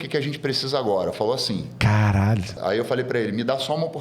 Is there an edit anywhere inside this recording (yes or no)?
yes